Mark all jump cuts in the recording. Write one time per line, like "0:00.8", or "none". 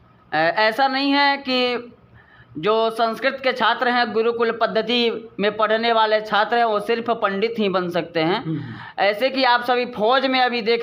none